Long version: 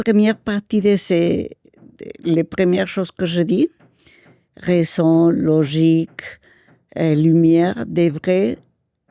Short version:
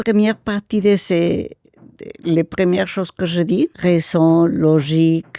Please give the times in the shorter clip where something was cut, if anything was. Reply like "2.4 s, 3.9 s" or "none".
3.8 s